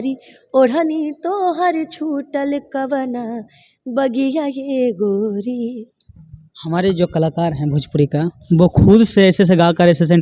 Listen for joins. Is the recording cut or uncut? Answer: uncut